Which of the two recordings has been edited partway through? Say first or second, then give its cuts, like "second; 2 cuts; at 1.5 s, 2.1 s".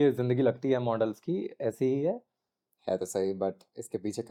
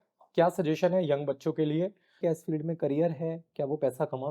second; 1 cut; at 2.2 s